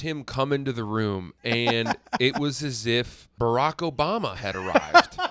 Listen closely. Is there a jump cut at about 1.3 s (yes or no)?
no